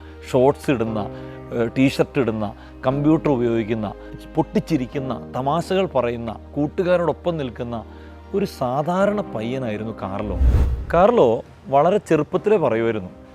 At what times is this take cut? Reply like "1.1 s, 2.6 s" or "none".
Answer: 10.6 s